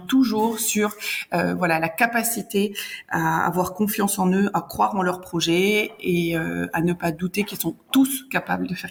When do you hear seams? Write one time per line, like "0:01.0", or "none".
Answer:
none